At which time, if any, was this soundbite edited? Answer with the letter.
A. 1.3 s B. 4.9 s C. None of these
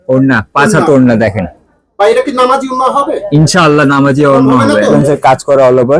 B